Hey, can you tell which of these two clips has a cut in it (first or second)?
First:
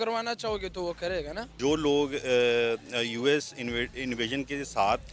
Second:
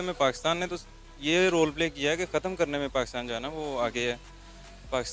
first